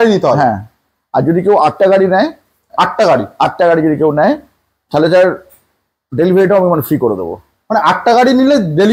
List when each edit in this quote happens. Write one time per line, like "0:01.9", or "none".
none